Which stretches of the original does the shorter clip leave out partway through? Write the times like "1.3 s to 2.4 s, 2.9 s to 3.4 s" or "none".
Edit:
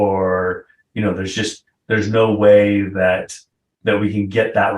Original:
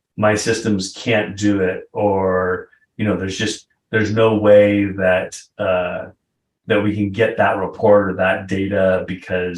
5.4 s to 6.2 s